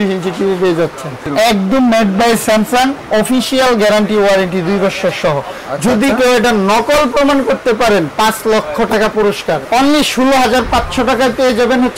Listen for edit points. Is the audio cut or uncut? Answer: cut